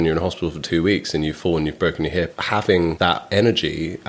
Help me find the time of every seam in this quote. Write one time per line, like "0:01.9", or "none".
0:02.8